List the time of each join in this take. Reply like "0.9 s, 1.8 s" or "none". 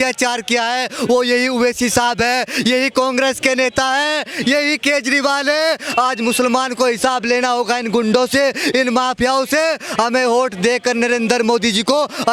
none